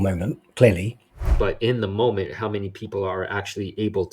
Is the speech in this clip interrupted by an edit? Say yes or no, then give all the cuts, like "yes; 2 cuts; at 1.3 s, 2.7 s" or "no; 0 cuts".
yes; 1 cut; at 1.3 s